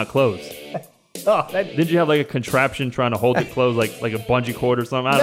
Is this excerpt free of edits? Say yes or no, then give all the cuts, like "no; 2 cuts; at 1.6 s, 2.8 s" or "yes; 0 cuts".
no; 1 cut; at 1.7 s